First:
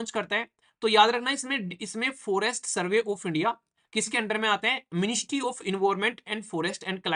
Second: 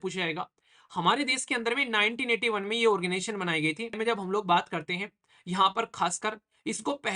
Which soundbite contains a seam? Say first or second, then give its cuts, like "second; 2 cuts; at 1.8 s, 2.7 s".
second; 1 cut; at 4.0 s